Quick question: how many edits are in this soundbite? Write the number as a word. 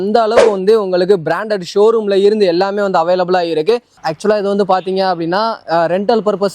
one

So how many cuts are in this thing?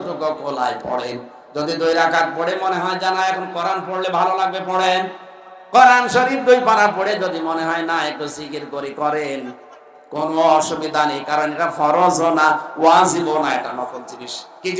zero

